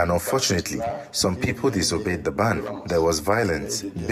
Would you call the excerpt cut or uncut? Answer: uncut